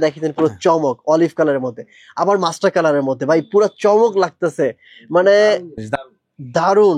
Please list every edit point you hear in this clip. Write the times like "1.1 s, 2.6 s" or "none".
none